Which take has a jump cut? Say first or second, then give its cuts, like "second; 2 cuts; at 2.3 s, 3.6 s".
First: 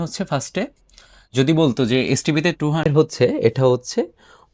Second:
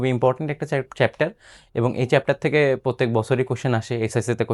first; 1 cut; at 2.9 s